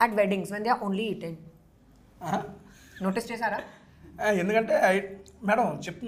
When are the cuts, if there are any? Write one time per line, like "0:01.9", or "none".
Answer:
none